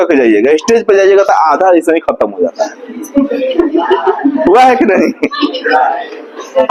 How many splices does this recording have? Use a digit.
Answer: 0